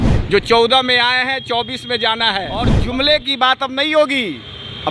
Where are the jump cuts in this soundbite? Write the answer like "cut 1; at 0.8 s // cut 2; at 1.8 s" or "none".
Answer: cut 1; at 2.8 s